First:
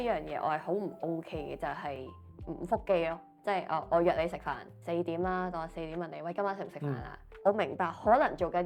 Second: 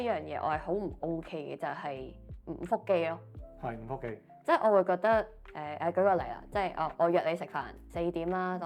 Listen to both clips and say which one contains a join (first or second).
first